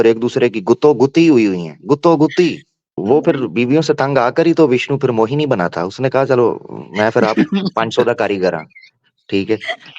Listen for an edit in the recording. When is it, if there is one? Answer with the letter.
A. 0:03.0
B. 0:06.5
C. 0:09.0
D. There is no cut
A